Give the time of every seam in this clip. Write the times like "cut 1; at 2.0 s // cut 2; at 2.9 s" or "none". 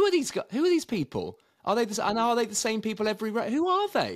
none